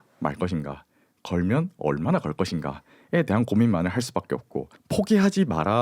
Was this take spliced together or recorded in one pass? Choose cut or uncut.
cut